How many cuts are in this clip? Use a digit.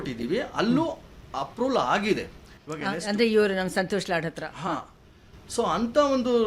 0